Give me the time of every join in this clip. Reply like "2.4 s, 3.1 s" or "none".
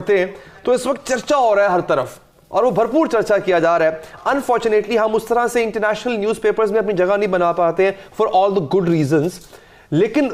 none